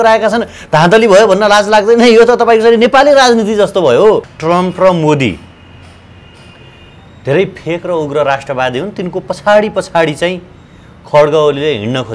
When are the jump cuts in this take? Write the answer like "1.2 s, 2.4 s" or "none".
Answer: 4.3 s